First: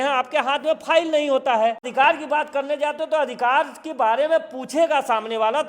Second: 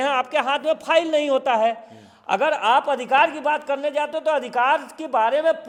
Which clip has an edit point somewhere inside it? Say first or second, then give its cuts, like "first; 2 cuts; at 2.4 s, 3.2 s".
first; 1 cut; at 1.9 s